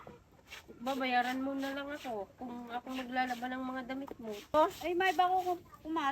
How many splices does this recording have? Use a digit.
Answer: 1